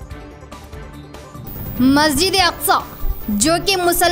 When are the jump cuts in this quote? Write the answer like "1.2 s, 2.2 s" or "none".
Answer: 1.2 s